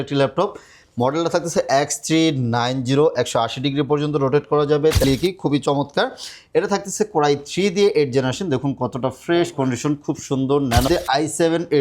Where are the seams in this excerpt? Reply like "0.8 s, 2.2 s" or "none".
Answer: 5.0 s, 10.9 s